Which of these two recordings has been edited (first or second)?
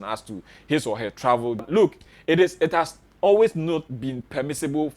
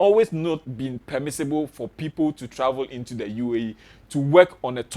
first